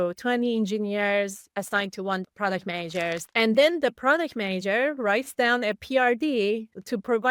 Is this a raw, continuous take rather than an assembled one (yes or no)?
no